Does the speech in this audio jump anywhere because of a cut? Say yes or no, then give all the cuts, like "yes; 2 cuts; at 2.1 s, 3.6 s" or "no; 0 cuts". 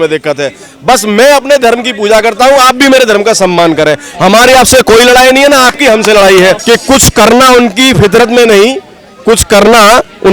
yes; 1 cut; at 6.6 s